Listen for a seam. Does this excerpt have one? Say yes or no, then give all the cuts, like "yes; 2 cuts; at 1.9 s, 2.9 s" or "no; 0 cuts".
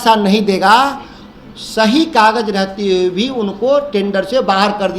no; 0 cuts